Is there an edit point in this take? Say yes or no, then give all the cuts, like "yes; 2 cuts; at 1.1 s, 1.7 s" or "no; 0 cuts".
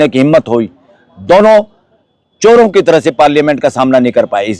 no; 0 cuts